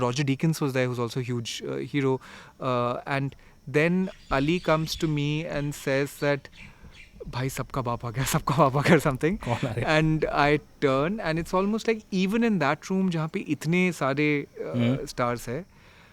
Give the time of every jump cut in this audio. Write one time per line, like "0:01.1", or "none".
none